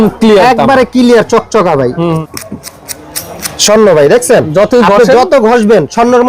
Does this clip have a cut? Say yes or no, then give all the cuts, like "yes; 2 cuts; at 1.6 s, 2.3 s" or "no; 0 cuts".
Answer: yes; 1 cut; at 2.3 s